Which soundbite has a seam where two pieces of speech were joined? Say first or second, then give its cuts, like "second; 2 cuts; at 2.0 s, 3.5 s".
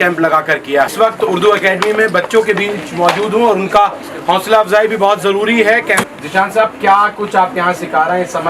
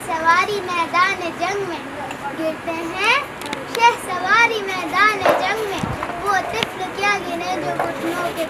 first; 2 cuts; at 0.9 s, 6.0 s